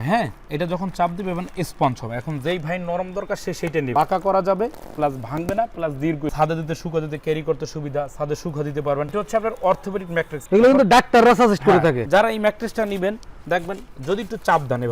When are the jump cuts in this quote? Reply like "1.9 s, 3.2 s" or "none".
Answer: 3.9 s, 9.1 s, 12.1 s